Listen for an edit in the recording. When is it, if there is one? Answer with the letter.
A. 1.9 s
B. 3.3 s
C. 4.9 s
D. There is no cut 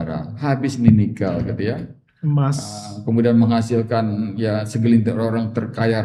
D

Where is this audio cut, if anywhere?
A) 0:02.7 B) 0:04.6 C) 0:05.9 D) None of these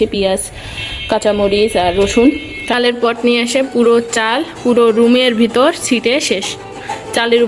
A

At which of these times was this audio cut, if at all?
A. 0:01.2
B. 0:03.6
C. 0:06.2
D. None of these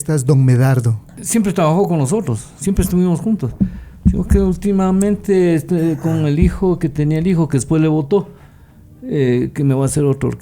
A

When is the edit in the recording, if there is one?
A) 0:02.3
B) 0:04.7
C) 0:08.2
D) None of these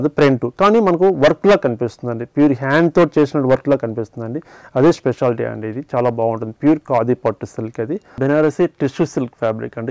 C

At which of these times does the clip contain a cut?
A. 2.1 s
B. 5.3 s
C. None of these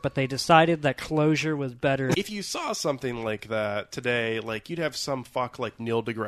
A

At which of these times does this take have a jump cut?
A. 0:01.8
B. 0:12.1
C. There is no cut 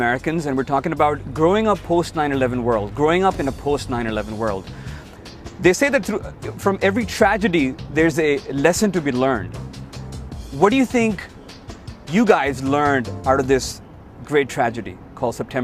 A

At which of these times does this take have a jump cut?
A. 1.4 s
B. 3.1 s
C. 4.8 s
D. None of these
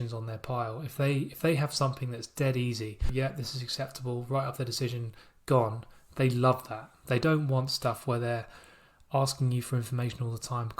B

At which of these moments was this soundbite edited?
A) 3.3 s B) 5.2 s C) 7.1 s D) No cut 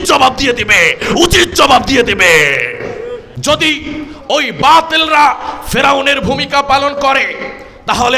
A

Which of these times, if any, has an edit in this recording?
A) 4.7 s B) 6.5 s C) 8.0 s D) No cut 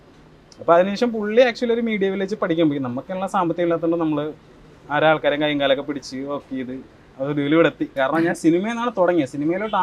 C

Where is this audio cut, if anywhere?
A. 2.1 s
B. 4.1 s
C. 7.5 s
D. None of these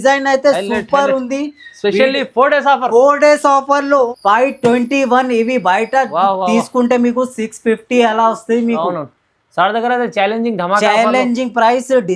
B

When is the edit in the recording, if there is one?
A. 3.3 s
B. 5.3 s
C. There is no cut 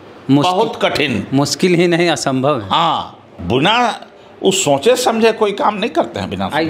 A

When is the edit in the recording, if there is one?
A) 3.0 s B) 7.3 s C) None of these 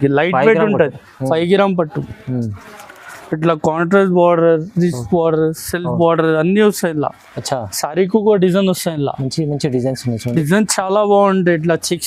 C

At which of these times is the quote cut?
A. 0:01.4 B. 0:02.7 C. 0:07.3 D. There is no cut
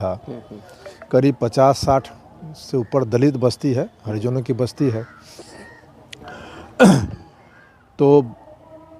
D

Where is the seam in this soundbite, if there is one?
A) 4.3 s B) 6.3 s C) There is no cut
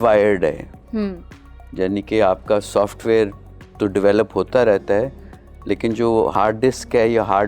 B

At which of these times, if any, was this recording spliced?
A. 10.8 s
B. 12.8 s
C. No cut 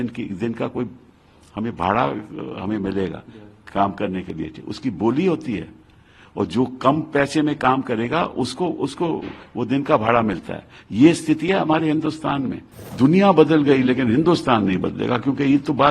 B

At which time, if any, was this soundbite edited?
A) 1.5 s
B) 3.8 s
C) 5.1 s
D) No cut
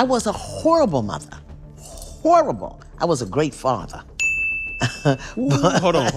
D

